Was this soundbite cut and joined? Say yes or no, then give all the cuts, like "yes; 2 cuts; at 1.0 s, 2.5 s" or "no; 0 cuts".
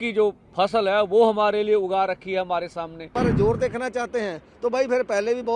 yes; 1 cut; at 3.1 s